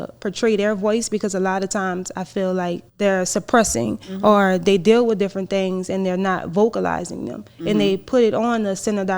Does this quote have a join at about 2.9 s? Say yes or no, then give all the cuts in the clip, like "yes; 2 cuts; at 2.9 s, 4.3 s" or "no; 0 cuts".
yes; 1 cut; at 2.9 s